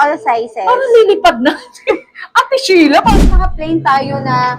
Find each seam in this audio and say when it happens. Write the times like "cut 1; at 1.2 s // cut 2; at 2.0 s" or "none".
cut 1; at 3.1 s